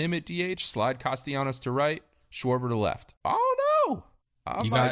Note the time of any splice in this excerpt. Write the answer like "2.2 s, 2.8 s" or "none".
3.1 s